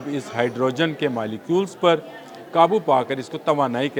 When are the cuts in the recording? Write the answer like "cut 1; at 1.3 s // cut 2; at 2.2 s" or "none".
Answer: none